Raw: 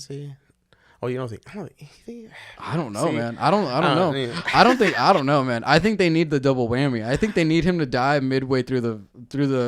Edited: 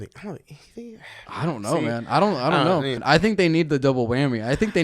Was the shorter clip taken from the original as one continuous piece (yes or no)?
no